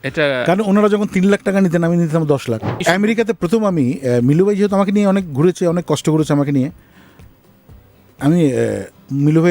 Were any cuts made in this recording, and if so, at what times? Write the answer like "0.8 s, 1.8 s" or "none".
2.8 s